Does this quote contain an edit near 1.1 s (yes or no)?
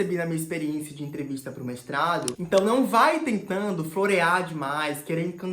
no